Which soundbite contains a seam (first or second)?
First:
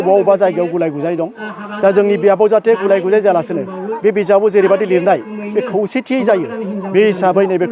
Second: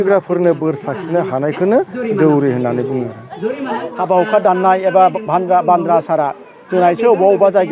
second